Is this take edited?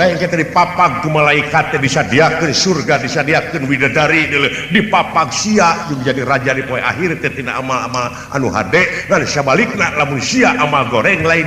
no; 0 cuts

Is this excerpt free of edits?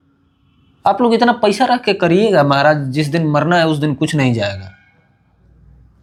yes; 0 cuts

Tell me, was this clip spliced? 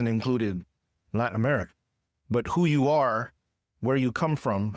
no; 0 cuts

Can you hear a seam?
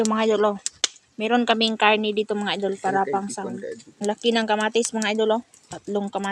yes; 1 cut; at 3.9 s

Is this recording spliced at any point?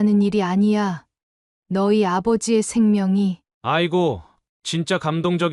no; 0 cuts

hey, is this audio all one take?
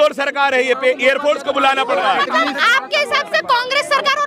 yes; 0 cuts

